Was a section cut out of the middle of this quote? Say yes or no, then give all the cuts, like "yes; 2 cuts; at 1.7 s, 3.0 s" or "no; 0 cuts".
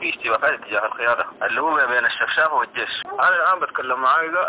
yes; 2 cuts; at 1.3 s, 3.0 s